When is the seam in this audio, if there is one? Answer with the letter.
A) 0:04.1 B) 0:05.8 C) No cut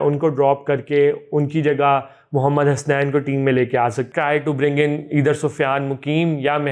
A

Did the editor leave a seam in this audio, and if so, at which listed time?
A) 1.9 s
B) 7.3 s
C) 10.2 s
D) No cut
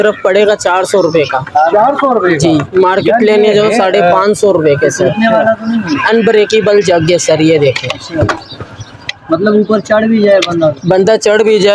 D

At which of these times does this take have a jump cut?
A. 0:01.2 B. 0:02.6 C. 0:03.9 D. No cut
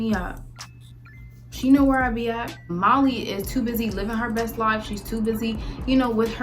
B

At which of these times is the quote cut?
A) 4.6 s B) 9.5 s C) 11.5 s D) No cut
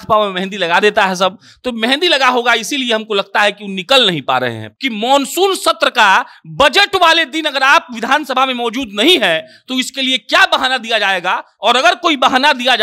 A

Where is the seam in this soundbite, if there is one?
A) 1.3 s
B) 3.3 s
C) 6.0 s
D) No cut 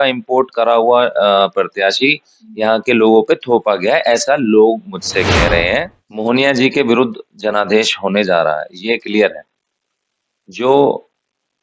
C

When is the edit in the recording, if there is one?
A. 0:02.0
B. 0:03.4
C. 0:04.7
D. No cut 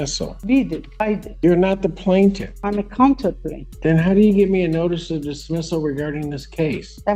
D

